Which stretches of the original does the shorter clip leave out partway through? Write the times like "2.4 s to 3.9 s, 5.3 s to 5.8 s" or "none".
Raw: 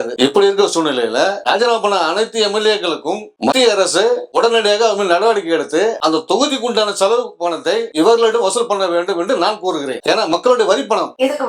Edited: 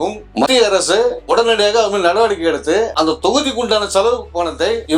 none